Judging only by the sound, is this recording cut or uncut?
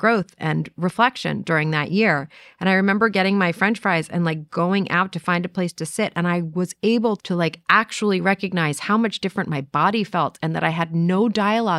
cut